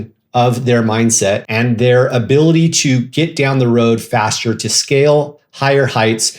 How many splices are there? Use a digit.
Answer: 1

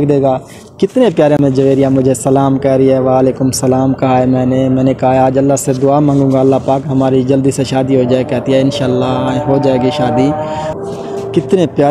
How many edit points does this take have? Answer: 1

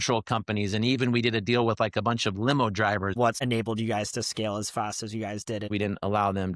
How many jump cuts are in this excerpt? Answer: 2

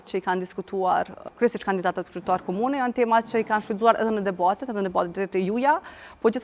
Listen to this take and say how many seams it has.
1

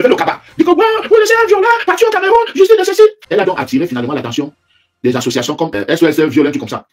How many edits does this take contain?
2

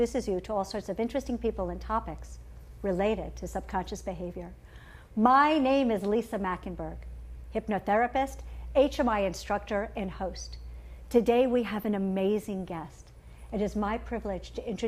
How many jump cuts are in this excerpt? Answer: 1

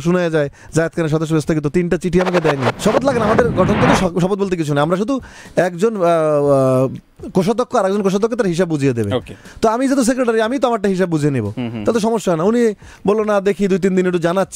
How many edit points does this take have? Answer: 1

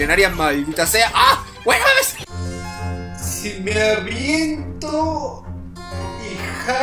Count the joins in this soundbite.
1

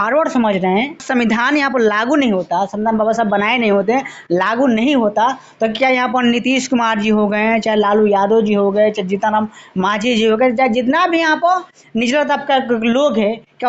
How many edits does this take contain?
1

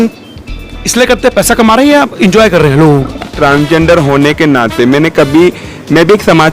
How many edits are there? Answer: 1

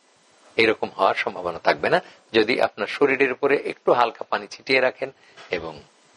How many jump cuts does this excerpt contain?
0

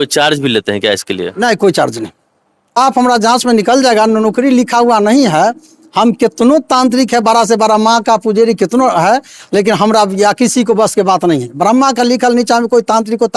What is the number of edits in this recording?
1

